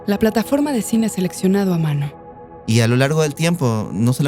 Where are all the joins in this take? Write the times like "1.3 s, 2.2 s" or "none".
2.6 s